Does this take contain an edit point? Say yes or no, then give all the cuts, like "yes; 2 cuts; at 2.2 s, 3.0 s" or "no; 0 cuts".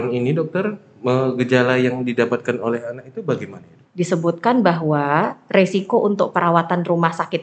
yes; 1 cut; at 3.8 s